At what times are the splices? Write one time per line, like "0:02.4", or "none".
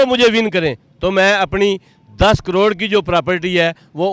none